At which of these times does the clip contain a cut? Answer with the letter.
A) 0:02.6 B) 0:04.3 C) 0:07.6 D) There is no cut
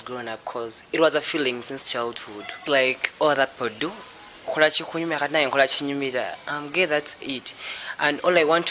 A